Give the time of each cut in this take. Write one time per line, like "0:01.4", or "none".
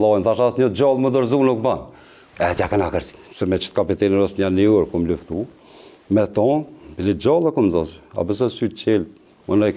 0:03.2